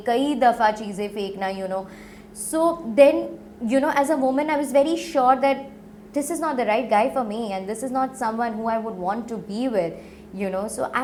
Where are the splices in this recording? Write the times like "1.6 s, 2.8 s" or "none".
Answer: none